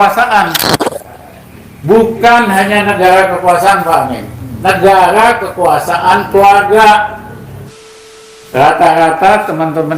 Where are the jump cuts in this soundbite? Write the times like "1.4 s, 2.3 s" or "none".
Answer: 8.2 s